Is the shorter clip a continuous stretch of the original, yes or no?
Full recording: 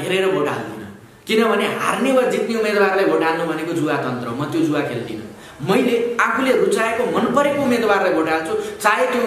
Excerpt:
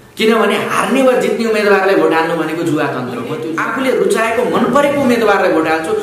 no